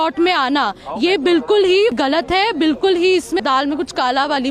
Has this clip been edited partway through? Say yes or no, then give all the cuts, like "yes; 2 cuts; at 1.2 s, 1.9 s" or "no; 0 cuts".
yes; 2 cuts; at 2.0 s, 3.4 s